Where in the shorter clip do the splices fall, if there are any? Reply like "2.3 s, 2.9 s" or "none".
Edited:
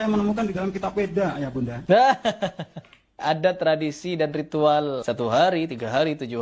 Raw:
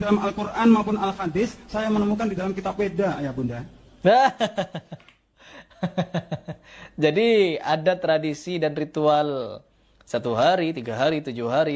1.8 s, 3.2 s, 5.0 s

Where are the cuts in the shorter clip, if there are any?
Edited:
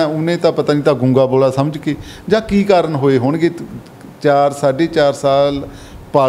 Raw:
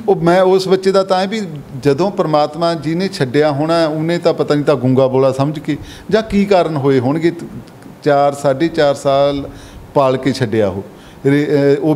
none

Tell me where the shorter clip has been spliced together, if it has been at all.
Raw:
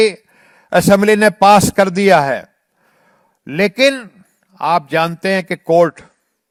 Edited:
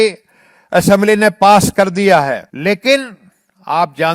2.5 s

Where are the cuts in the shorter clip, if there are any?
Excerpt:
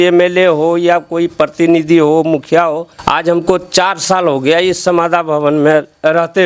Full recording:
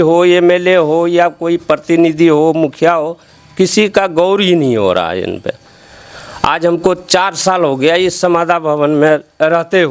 2.9 s

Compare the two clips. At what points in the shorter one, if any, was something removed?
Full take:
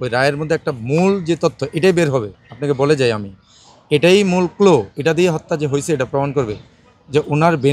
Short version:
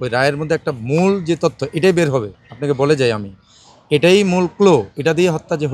none

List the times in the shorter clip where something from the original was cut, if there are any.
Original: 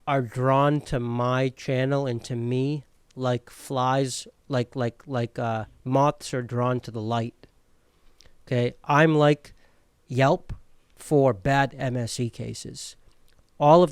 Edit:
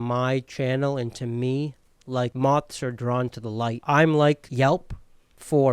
2.3 s, 3.8 s, 4.5 s

